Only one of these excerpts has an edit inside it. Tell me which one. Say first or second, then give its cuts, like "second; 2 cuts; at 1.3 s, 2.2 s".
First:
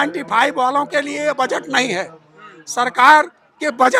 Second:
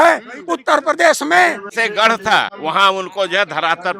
second; 2 cuts; at 1.7 s, 2.5 s